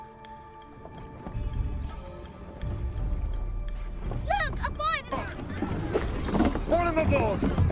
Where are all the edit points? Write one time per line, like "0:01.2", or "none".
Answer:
0:01.3